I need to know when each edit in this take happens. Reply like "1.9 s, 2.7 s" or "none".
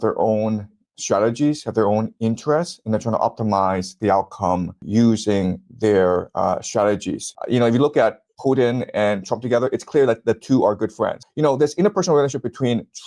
7.3 s, 11.2 s

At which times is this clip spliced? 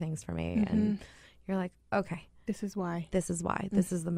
none

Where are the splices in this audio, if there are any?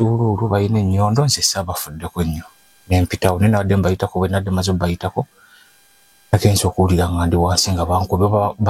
none

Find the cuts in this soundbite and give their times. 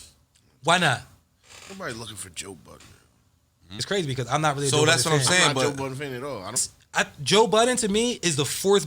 3.7 s, 6.7 s

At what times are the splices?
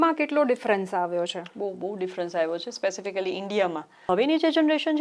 4.0 s

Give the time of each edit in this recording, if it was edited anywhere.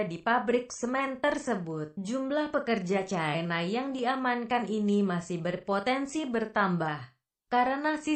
none

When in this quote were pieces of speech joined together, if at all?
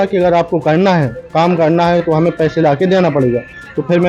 none

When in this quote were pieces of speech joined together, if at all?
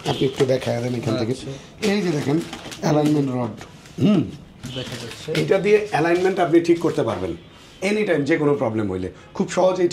none

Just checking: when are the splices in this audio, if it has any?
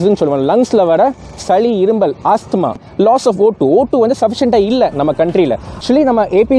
2.8 s, 5.7 s

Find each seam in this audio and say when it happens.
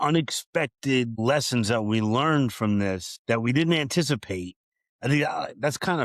1.1 s, 3.1 s

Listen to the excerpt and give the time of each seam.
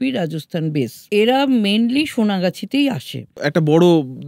1.0 s, 3.3 s

